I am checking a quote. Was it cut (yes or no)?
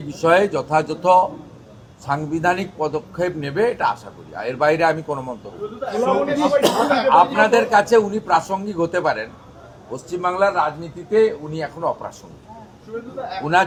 no